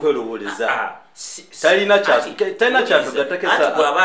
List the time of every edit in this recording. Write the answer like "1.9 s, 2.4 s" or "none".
none